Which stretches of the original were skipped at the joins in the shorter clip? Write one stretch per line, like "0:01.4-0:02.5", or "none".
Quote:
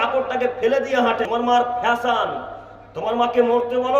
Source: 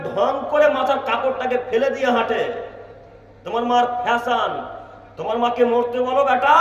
0:02.4-0:03.5

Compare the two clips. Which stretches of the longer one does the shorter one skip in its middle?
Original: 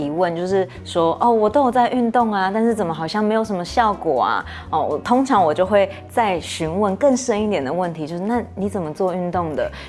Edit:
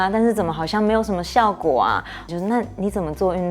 0:04.6-0:08.0

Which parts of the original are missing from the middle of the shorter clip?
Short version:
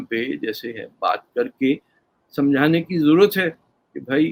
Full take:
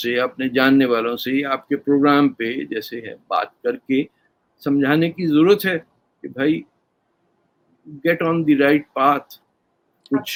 none

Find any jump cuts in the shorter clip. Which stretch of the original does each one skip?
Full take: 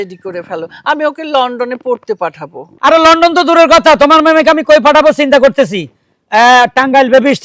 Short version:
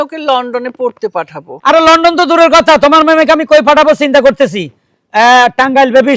0:02.5-0:02.6

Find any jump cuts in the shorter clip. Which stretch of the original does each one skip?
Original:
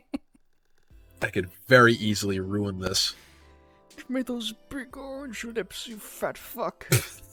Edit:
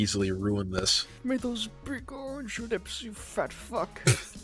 0:03.1-0:03.9

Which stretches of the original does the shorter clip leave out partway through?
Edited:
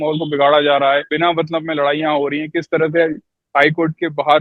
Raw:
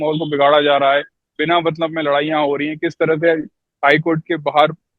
0:01.1-0:01.4

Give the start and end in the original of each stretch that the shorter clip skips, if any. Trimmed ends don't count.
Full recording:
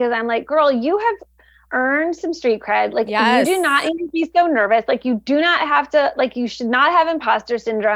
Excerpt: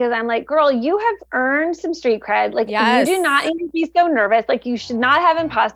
0:01.2-0:01.6
0:05.0-0:06.3

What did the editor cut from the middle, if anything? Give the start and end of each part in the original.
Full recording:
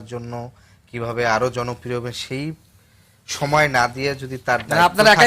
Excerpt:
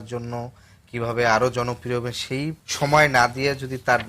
0:02.6-0:03.2

